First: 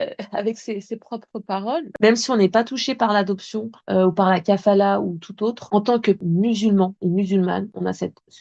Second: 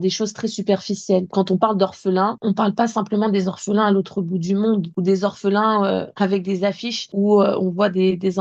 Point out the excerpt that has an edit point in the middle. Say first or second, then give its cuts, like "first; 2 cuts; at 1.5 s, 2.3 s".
first; 1 cut; at 1.9 s